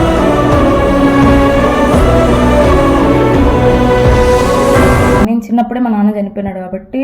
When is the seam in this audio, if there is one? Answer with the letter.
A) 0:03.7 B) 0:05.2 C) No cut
B